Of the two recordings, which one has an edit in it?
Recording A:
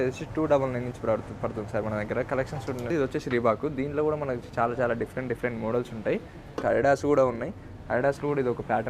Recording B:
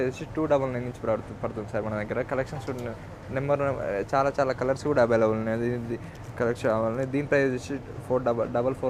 A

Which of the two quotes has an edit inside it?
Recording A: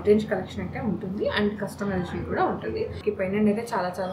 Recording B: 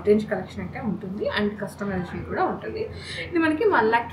A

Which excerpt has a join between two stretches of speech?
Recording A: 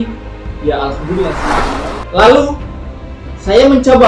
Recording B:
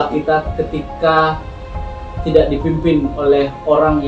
A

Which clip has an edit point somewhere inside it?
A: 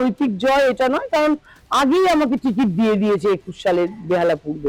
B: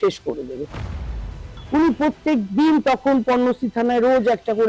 B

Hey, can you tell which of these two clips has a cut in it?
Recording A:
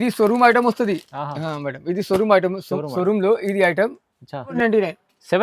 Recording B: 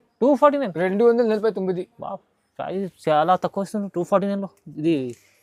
A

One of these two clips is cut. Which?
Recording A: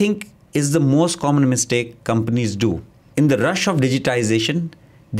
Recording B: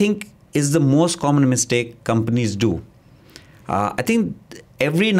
A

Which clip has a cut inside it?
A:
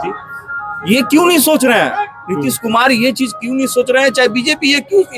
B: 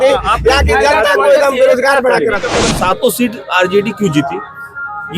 B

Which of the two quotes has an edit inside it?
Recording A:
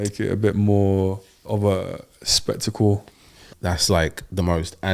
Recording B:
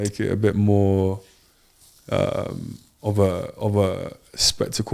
A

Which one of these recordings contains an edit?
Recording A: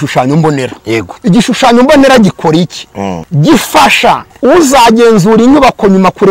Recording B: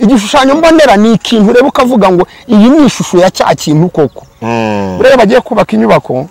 A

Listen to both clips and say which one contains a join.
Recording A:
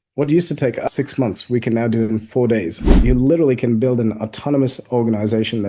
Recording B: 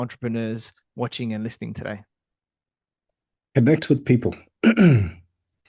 A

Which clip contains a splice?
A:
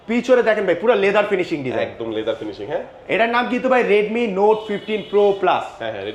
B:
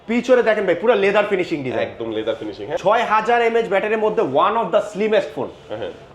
B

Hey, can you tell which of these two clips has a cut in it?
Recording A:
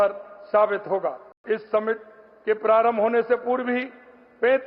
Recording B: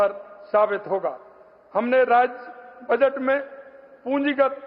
A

